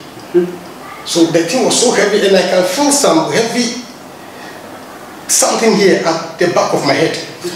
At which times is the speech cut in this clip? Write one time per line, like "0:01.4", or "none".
none